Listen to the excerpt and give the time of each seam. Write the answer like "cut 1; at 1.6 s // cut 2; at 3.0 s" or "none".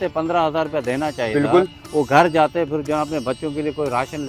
none